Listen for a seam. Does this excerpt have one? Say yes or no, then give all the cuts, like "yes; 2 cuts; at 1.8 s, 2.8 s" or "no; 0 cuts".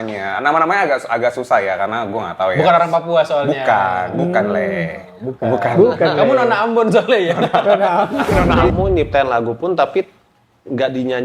yes; 1 cut; at 8.7 s